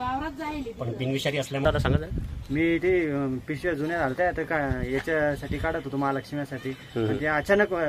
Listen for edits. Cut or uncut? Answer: cut